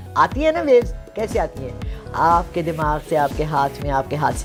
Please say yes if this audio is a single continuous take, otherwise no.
yes